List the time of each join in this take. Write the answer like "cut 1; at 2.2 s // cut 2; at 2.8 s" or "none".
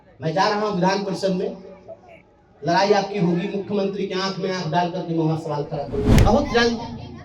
cut 1; at 6.2 s